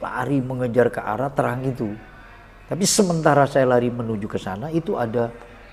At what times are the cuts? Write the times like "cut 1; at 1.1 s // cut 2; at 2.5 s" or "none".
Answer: none